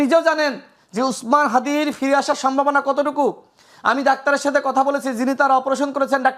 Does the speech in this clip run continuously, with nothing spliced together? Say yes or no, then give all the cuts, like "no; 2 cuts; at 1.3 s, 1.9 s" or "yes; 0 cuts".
yes; 0 cuts